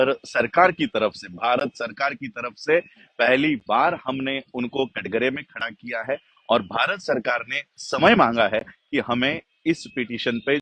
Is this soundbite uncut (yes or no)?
yes